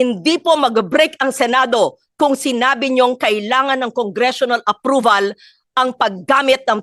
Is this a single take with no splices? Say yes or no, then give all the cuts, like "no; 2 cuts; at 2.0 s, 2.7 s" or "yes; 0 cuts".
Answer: yes; 0 cuts